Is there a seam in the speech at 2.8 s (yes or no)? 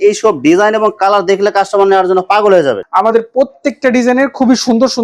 yes